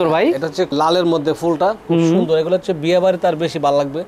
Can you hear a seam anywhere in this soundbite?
no; 0 cuts

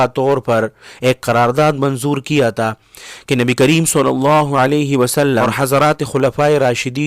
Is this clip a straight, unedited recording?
no; 1 cut; at 5.5 s

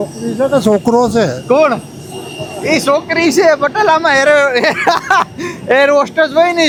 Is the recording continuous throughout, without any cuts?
yes; 0 cuts

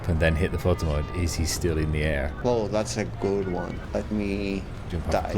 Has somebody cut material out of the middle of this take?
yes; 2 cuts; at 2.4 s, 3.8 s

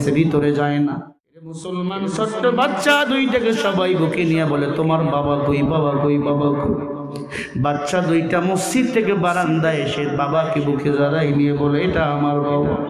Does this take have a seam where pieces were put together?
yes; 1 cut; at 1.6 s

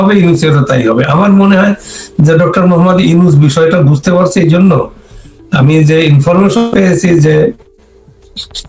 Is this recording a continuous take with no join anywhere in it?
yes; 0 cuts

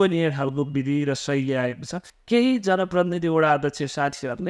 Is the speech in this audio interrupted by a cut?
yes; 1 cut; at 2.1 s

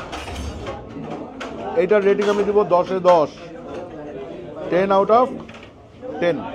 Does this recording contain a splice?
yes; 1 cut; at 1.1 s

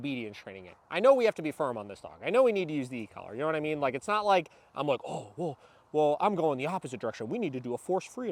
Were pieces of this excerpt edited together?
no; 0 cuts

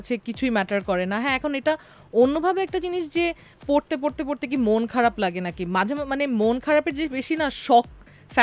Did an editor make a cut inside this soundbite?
no; 0 cuts

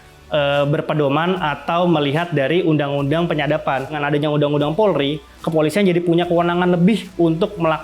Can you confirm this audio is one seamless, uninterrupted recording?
no; 1 cut; at 4.0 s

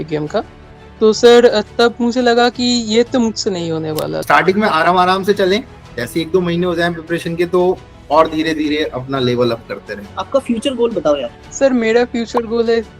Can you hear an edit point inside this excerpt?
yes; 3 cuts; at 4.2 s, 10.1 s, 11.4 s

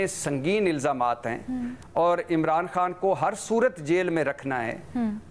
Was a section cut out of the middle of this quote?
no; 0 cuts

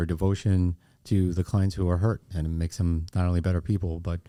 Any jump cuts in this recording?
no; 0 cuts

